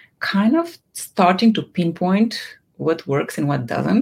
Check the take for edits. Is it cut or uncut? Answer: uncut